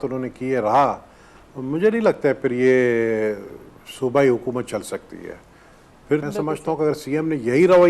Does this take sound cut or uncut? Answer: cut